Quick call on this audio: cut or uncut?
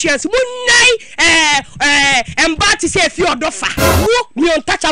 uncut